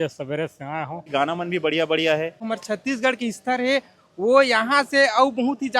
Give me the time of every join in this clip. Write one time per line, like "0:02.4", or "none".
0:01.1
0:02.4